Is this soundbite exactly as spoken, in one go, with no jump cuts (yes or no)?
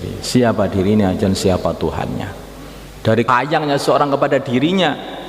no